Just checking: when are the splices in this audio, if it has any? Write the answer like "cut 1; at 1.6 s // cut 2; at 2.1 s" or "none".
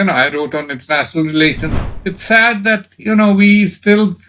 cut 1; at 1.7 s